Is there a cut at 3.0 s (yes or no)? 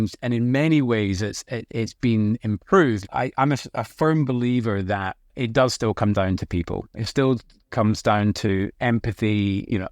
yes